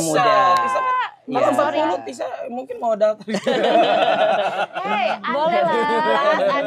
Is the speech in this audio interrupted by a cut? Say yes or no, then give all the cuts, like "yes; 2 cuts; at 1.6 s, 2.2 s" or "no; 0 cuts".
no; 0 cuts